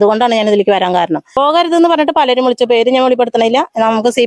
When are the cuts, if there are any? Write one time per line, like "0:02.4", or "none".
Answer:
0:01.2